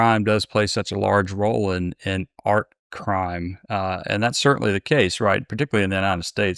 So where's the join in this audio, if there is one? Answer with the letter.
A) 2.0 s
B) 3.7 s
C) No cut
C